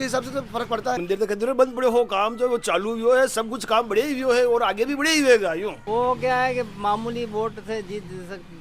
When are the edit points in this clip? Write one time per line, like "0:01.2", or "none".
0:01.0
0:05.8